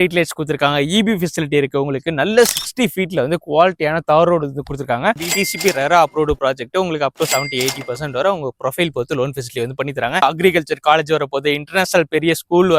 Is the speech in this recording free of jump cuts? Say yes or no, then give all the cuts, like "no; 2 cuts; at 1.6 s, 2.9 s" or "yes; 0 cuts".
no; 2 cuts; at 5.2 s, 10.2 s